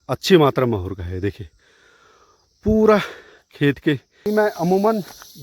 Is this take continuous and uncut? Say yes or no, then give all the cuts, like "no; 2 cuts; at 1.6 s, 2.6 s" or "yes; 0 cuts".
no; 1 cut; at 4.2 s